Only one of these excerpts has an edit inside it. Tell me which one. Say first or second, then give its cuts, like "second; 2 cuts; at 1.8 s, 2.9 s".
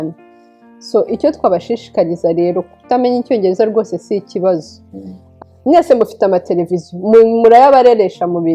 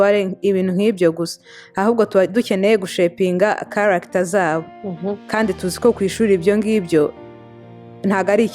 first; 1 cut; at 5.3 s